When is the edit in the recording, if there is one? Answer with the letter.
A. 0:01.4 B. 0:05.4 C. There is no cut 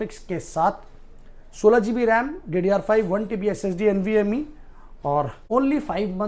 B